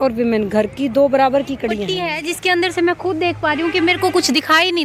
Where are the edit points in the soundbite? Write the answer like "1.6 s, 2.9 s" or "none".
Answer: 1.9 s